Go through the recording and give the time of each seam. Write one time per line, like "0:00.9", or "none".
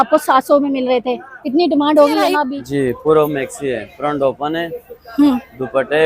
0:02.6